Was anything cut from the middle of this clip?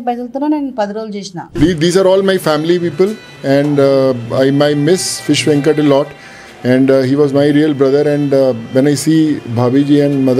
yes; 1 cut; at 1.4 s

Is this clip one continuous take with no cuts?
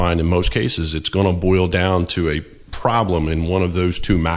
yes; 0 cuts

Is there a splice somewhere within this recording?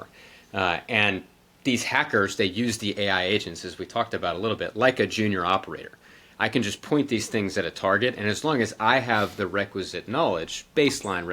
no; 0 cuts

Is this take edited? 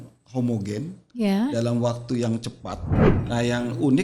yes; 1 cut; at 2.9 s

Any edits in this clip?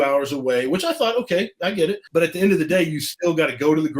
no; 0 cuts

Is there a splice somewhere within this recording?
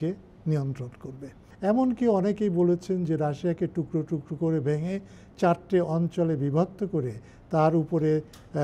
yes; 1 cut; at 1.4 s

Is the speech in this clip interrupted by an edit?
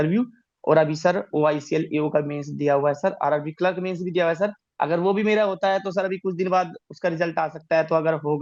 no; 0 cuts

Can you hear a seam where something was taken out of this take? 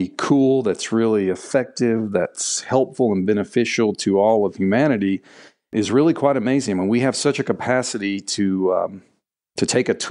no; 0 cuts

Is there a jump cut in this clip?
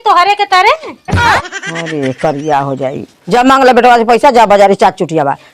yes; 1 cut; at 3.2 s

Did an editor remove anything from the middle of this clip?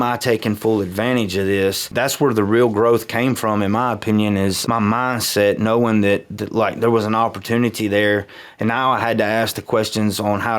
yes; 2 cuts; at 1.9 s, 4.6 s

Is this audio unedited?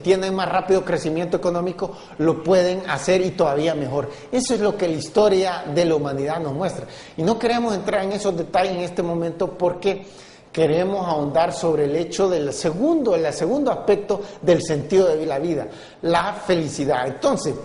no; 1 cut; at 10.3 s

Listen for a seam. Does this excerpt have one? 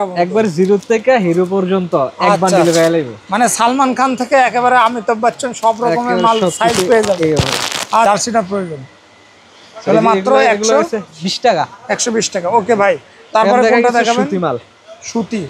yes; 1 cut; at 8.1 s

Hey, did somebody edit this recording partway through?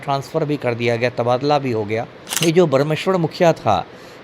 yes; 1 cut; at 2.2 s

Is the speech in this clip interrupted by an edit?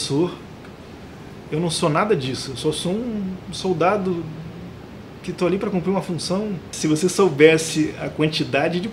yes; 1 cut; at 6.6 s

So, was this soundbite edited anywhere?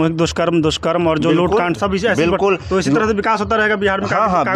no; 0 cuts

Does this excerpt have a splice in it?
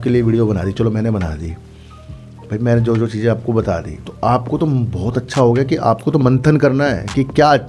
no; 0 cuts

